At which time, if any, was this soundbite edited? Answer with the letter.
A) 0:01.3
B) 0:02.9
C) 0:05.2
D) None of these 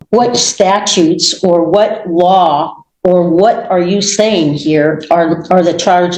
D